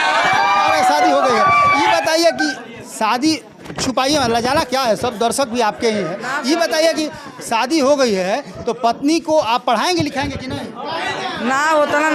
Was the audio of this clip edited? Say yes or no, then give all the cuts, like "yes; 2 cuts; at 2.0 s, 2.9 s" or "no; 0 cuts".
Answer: no; 0 cuts